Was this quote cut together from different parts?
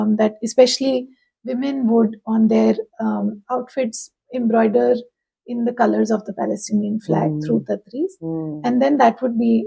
no; 0 cuts

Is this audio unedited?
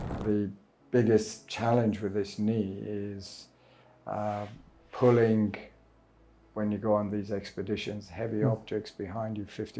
yes; 0 cuts

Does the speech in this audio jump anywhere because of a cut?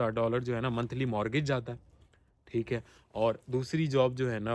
no; 0 cuts

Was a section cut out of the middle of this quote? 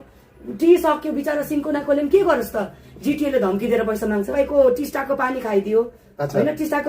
yes; 1 cut; at 4.3 s

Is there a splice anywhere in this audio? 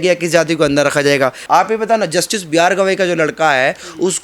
yes; 1 cut; at 1.4 s

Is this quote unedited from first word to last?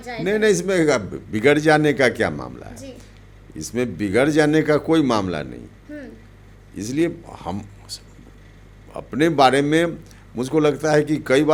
yes; 0 cuts

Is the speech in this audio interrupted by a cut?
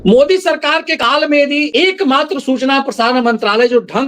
yes; 2 cuts; at 1.0 s, 1.7 s

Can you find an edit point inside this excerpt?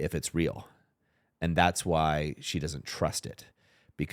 no; 0 cuts

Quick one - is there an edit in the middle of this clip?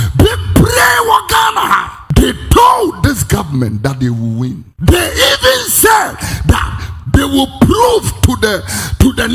yes; 2 cuts; at 2.0 s, 4.7 s

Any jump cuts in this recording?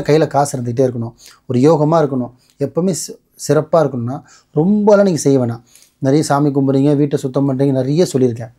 no; 0 cuts

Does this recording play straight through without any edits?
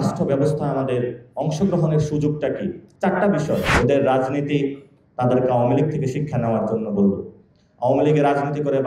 no; 2 cuts; at 2.8 s, 3.7 s

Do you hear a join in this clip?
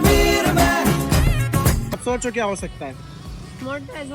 yes; 1 cut; at 1.9 s

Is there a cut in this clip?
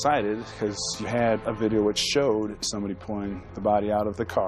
yes; 1 cut; at 2.6 s

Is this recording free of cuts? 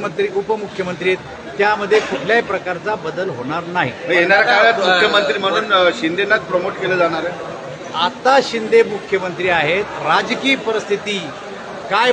yes; 0 cuts

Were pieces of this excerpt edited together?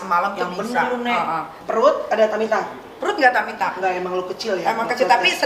yes; 1 cut; at 1.5 s

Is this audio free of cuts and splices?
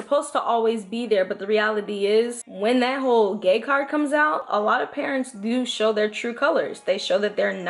no; 1 cut; at 2.4 s

